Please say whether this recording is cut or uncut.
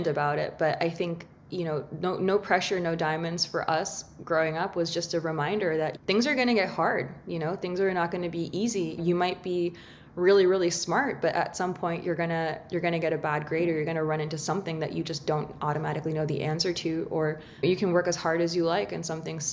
uncut